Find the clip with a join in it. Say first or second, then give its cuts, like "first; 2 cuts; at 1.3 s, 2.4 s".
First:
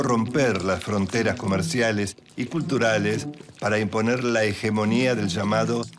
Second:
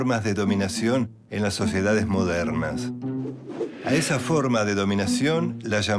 first; 1 cut; at 1.7 s